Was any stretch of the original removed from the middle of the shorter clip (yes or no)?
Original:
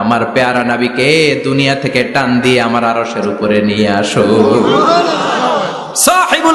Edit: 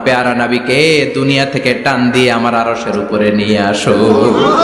no